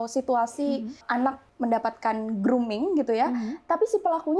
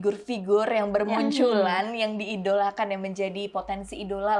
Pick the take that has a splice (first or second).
first